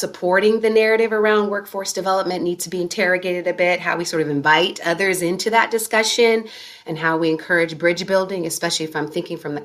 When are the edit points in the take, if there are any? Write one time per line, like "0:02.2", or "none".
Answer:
none

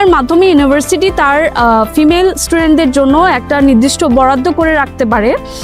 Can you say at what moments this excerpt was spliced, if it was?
none

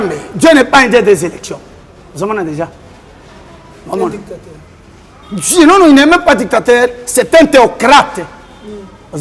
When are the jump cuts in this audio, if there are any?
none

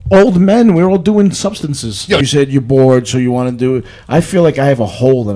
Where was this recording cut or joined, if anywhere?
0:02.2

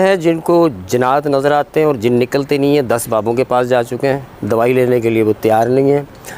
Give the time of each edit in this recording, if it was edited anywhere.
0:04.3

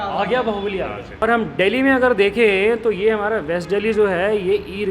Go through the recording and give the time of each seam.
0:01.2

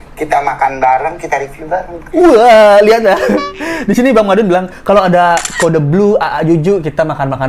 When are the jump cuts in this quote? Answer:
none

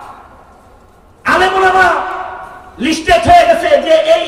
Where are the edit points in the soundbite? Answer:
none

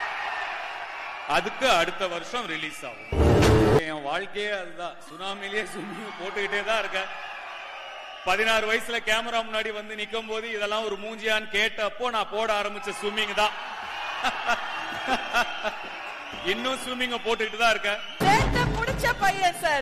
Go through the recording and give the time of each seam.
0:03.9
0:18.2

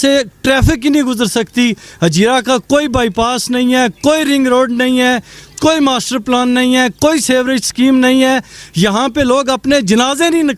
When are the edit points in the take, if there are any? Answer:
none

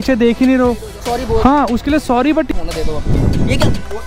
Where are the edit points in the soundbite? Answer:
0:00.9
0:02.5

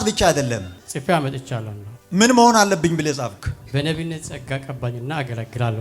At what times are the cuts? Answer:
0:01.8
0:03.6

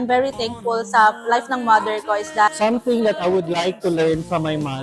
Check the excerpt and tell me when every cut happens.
0:02.5

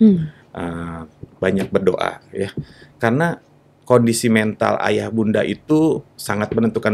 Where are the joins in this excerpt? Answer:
none

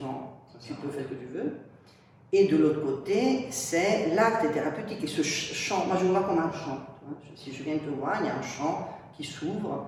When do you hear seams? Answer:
none

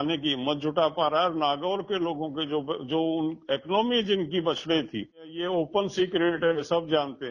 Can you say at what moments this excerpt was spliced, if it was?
0:05.4

